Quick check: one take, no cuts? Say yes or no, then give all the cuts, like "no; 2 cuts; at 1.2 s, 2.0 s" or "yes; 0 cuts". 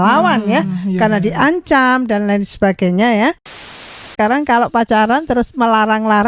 no; 1 cut; at 3.8 s